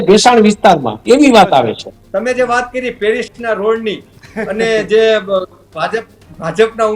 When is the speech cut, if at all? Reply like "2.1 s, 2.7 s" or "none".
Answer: 1.9 s